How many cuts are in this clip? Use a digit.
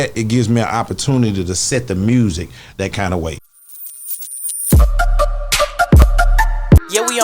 1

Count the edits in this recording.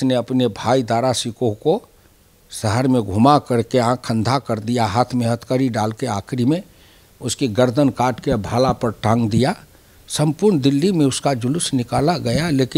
0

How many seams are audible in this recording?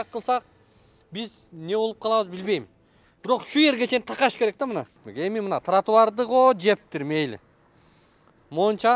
1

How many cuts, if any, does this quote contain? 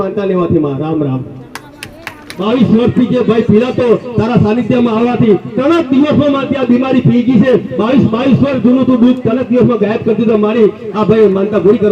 1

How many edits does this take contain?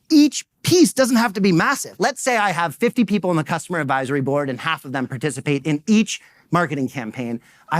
1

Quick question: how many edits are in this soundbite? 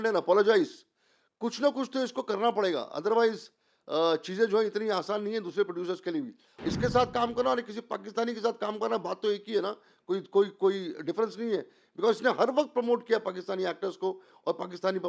1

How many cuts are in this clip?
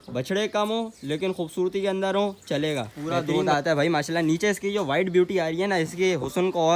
1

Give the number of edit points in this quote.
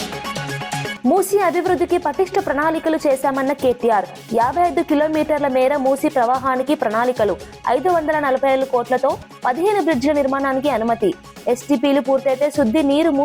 1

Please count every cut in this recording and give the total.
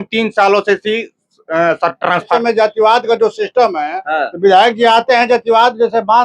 1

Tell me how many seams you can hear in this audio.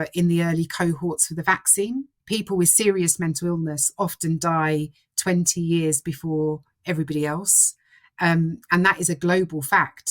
1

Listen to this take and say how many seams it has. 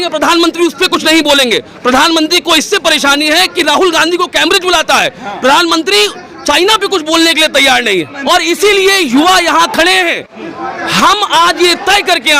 1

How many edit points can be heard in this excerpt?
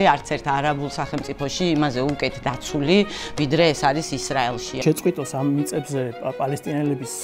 1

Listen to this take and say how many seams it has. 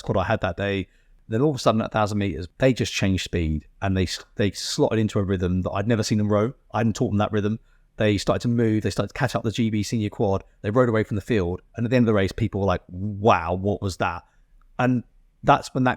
2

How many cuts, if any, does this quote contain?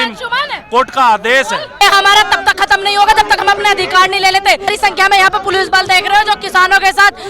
2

